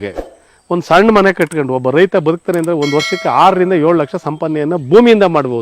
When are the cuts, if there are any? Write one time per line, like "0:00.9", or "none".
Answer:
none